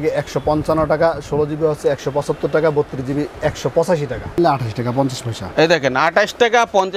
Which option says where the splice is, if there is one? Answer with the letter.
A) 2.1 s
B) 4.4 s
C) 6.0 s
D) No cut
B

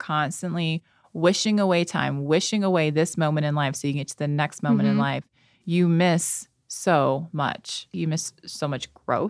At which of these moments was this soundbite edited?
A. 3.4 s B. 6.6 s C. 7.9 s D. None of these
C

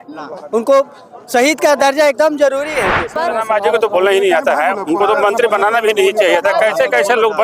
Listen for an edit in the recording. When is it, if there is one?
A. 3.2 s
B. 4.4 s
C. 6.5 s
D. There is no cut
A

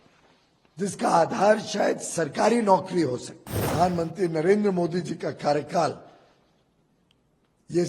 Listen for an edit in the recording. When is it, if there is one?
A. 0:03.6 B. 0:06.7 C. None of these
A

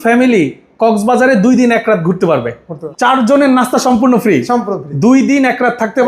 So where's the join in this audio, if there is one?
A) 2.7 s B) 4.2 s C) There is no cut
A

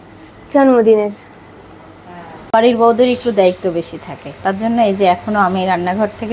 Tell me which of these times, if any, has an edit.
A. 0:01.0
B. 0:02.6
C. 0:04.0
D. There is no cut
B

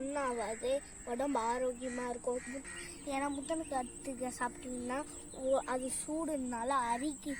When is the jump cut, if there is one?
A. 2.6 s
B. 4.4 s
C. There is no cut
A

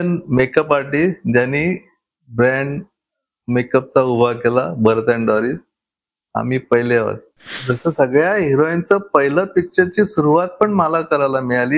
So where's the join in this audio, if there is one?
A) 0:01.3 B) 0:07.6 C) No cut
B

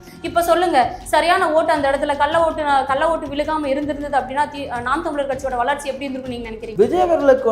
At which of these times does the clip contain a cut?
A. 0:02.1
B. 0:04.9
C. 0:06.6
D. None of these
C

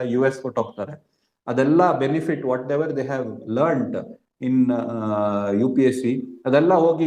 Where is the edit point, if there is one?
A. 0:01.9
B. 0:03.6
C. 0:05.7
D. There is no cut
D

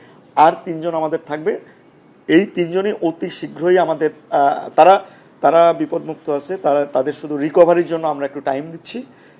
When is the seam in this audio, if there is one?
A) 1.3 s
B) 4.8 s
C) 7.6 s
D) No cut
D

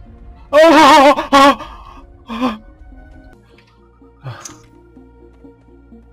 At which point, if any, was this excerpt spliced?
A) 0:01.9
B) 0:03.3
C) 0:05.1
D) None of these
B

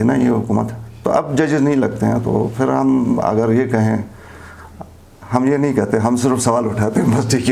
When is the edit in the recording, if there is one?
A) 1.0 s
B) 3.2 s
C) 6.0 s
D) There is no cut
D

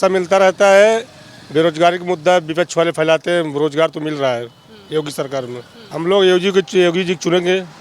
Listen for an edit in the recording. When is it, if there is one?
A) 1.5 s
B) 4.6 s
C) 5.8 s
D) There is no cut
C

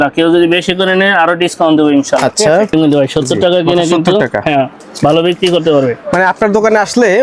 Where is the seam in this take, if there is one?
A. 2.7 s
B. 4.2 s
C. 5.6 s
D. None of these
A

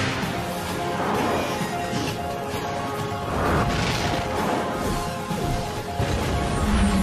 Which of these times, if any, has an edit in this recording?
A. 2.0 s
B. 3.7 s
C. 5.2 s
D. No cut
C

